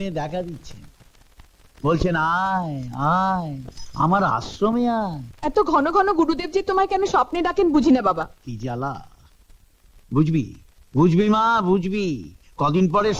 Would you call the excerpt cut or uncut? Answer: cut